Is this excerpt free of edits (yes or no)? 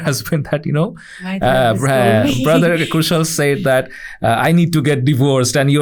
yes